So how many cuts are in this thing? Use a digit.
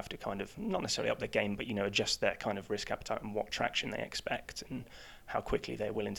0